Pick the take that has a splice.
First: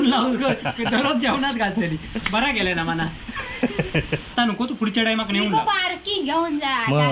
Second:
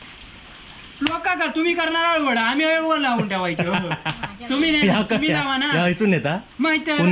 first; 1 cut; at 4.3 s

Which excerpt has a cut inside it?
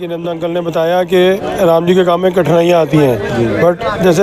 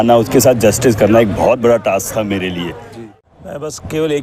second; 1 cut; at 2.9 s

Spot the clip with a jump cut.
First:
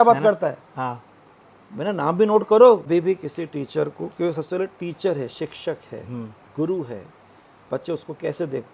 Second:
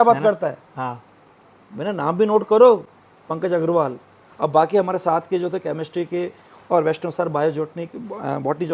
first; 1 cut; at 2.9 s

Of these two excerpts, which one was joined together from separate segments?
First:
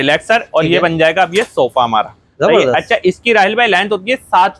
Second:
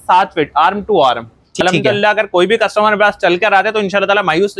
second; 1 cut; at 1.6 s

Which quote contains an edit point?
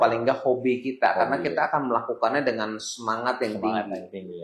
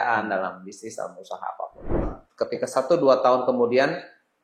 second; 1 cut; at 2.2 s

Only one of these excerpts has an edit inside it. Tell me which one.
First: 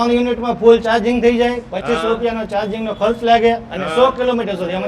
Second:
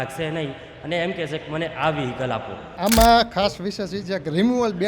second; 1 cut; at 2.7 s

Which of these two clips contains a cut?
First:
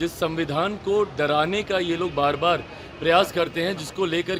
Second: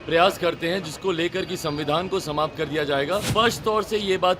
second; 1 cut; at 3.3 s

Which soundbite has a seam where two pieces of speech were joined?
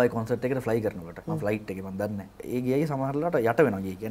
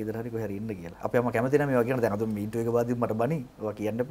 first; 2 cuts; at 1.1 s, 2.4 s

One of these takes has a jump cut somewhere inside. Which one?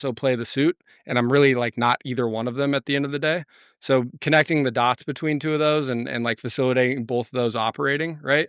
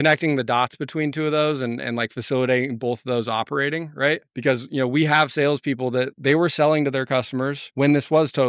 second; 2 cuts; at 6.1 s, 7.6 s

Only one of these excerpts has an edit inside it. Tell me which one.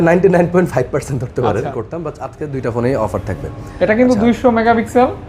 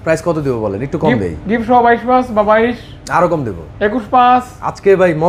first; 1 cut; at 1.8 s

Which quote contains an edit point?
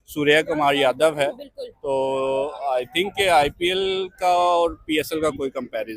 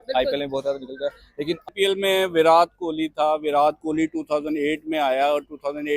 second; 1 cut; at 1.7 s

